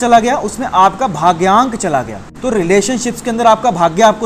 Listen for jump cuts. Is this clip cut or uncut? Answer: cut